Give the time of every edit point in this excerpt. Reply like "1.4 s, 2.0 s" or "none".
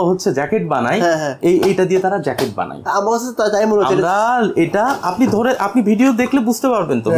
none

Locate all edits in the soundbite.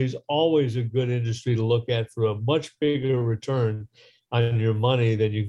none

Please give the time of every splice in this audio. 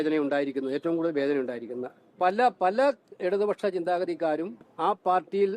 2.0 s, 4.6 s

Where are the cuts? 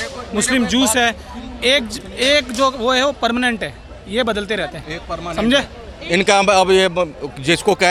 none

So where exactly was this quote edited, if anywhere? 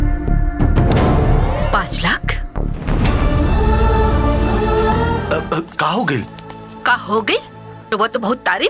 0.9 s, 4.9 s, 7.9 s

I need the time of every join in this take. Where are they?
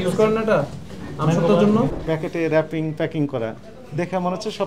2.0 s

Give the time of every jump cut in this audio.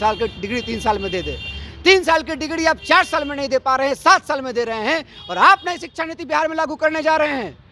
none

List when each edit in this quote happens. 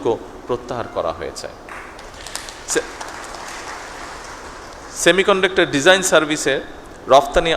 none

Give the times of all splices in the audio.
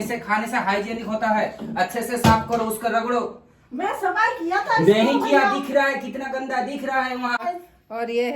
7.4 s

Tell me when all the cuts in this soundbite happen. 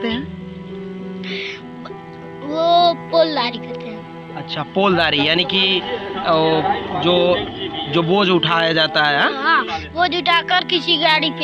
none

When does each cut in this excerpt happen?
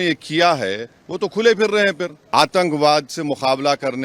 2.2 s

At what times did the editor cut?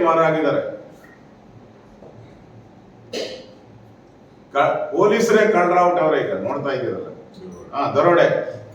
none

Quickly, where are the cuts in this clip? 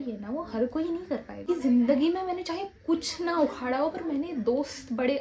1.4 s

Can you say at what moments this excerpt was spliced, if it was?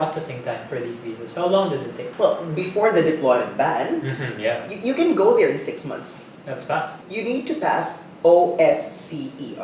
2.0 s, 6.9 s

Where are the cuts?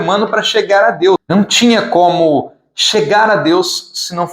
1.2 s

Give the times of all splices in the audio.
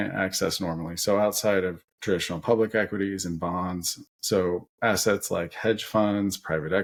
none

